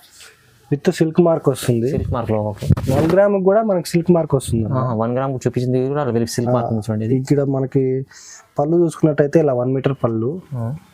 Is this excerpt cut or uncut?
uncut